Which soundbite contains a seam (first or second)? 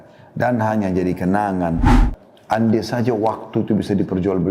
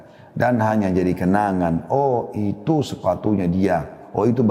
first